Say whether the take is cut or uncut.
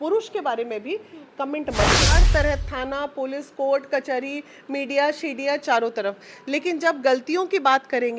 cut